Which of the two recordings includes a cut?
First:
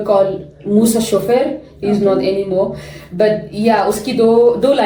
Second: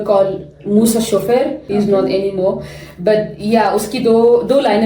second; 1 cut; at 1.6 s

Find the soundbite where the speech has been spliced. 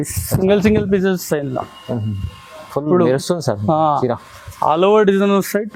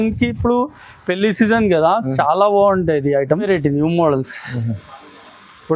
second; 1 cut; at 3.5 s

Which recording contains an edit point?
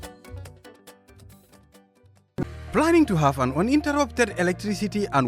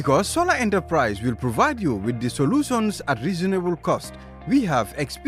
first; 1 cut; at 2.3 s

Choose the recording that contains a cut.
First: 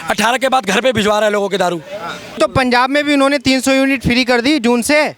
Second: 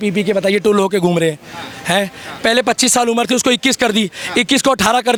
first; 1 cut; at 2.4 s

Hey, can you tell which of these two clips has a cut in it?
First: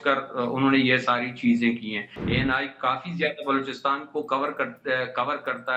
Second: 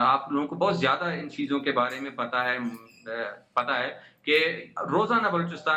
first; 1 cut; at 2.1 s

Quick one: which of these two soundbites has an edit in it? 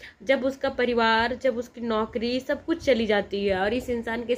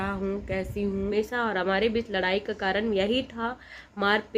second; 1 cut; at 1.1 s

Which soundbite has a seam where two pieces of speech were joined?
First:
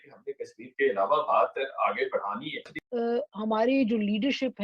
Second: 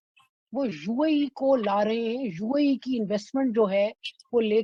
first; 1 cut; at 2.8 s

